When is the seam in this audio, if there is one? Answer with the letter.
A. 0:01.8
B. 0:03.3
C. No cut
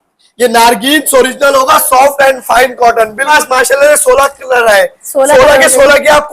B